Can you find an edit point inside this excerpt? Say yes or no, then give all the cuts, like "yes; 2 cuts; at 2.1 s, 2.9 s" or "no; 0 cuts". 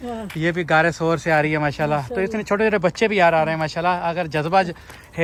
no; 0 cuts